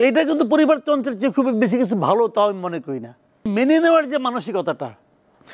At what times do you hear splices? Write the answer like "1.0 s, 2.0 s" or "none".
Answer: 3.5 s